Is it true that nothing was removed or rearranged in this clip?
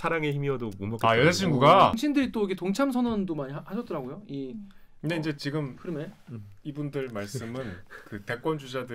no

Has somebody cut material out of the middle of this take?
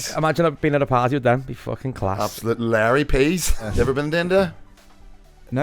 yes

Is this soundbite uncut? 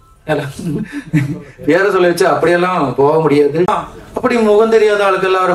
no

